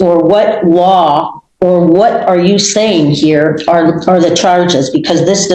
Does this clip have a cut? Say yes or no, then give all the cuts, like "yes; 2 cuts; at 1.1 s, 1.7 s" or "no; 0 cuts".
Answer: no; 0 cuts